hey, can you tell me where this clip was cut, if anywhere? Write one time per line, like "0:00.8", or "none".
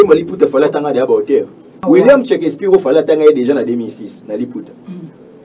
0:01.8